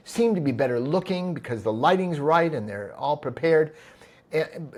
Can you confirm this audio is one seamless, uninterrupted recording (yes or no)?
yes